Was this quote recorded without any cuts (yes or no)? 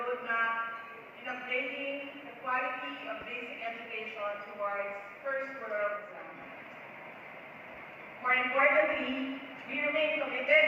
no